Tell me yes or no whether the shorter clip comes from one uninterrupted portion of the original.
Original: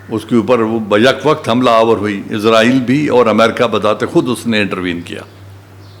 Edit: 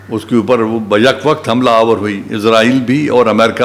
yes